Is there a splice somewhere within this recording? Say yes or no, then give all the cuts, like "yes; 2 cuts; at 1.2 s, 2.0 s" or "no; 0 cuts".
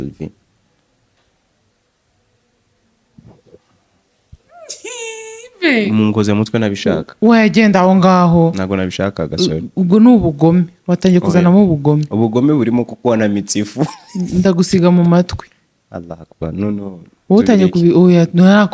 no; 0 cuts